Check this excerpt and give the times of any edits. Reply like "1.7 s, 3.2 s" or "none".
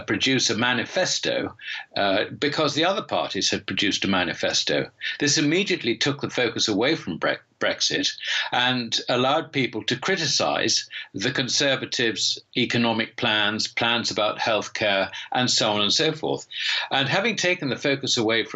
2.0 s